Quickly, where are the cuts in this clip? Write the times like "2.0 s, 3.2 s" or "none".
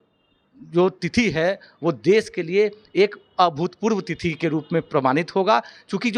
none